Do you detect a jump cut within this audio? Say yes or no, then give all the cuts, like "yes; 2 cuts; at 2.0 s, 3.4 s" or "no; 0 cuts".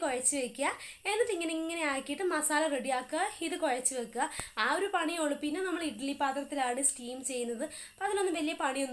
no; 0 cuts